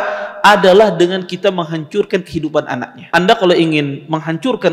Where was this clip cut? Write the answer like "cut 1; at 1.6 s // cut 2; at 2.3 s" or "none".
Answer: cut 1; at 3.0 s